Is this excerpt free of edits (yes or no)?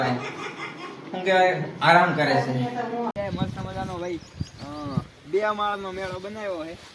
no